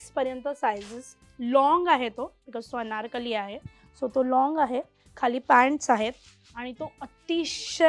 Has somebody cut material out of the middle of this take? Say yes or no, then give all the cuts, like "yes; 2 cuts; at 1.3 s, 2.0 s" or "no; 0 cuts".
no; 0 cuts